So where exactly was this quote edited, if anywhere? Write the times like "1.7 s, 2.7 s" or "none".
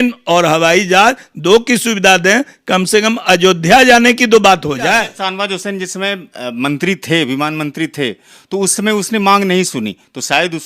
5.1 s